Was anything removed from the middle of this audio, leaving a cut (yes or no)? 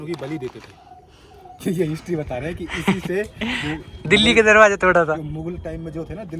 yes